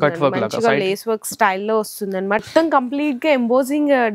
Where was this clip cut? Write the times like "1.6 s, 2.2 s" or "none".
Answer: 2.4 s